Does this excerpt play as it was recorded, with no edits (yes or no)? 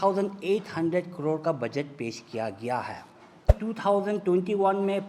no